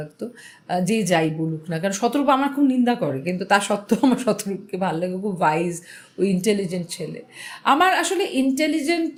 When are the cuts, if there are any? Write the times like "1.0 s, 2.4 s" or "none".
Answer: none